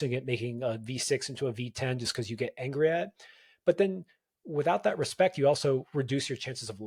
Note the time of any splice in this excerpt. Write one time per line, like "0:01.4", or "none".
none